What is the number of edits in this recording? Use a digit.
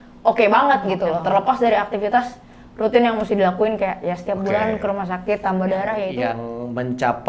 1